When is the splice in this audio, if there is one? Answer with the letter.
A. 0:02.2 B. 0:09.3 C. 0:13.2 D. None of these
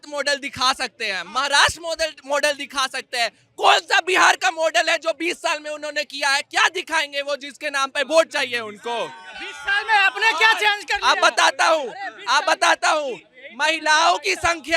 D